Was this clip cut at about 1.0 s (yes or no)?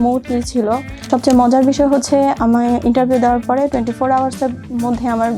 yes